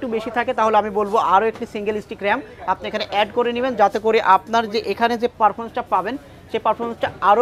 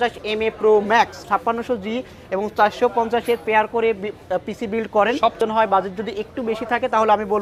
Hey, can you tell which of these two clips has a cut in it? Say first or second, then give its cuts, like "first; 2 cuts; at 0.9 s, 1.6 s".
second; 2 cuts; at 1.2 s, 5.4 s